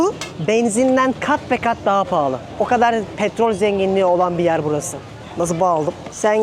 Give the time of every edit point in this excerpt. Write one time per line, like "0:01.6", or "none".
none